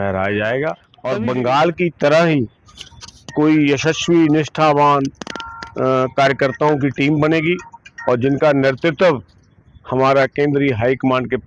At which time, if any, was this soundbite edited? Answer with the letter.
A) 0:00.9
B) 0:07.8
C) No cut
A